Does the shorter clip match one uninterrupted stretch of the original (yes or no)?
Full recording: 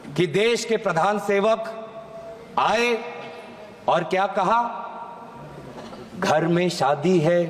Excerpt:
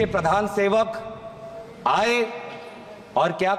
yes